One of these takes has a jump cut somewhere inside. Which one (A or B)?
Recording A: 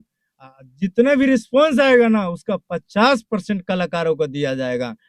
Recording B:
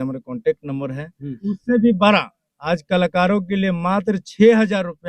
B